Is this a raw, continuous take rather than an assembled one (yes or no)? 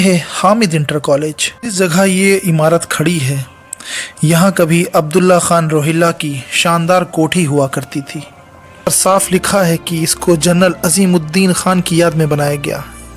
no